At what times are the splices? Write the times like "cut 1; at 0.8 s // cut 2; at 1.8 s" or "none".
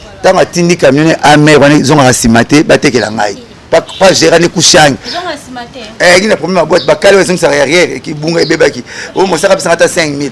none